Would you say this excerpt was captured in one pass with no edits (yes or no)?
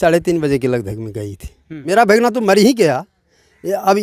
no